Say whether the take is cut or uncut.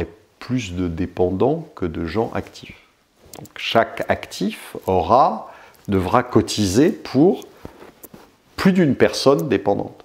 uncut